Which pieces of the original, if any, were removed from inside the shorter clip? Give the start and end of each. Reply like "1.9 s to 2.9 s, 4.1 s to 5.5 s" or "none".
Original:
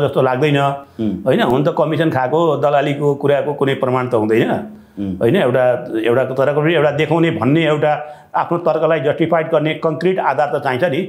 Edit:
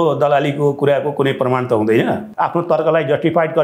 4.7 s to 8.2 s